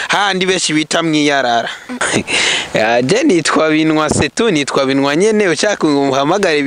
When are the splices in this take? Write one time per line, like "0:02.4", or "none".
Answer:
0:02.0